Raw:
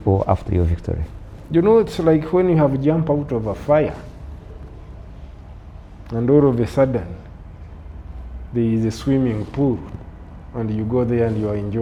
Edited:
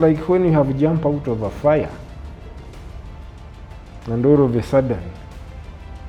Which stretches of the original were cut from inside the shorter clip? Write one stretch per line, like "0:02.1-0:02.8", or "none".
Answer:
none

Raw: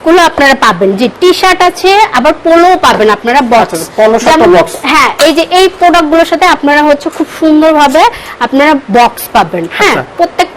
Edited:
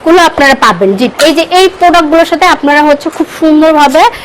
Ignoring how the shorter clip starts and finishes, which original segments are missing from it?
0:01.1-0:05.1

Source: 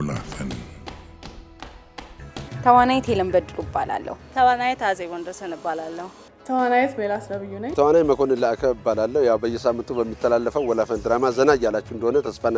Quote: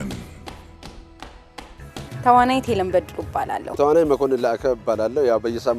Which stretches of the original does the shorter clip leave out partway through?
0:04.0-0:07.6

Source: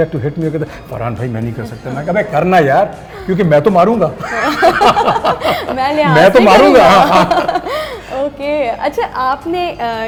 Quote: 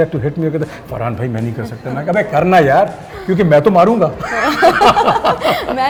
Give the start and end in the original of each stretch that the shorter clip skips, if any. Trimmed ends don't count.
none

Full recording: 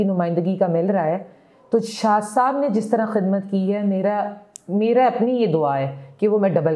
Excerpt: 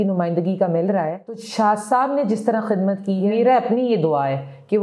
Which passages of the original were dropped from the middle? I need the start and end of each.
0:01.5-0:01.9
0:03.7-0:04.8

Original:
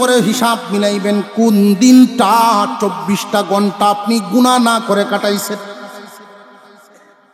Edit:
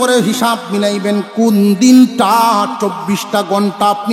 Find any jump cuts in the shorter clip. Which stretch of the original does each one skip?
none

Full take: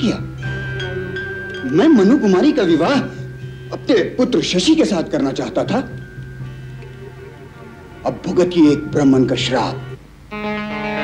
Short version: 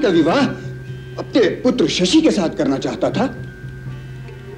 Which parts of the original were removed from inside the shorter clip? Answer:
none

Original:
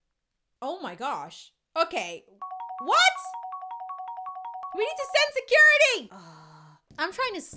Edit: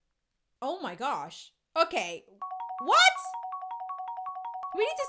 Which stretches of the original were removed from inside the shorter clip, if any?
none

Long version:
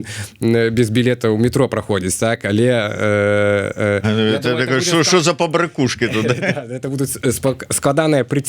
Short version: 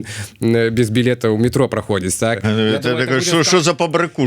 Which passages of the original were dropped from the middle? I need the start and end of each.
0:02.4-0:04.0

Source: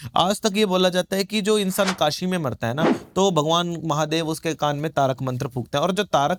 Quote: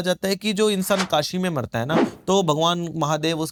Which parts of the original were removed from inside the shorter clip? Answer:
none

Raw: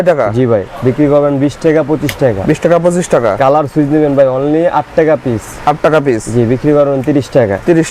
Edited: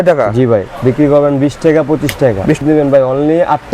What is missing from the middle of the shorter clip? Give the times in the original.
0:02.6-0:03.9

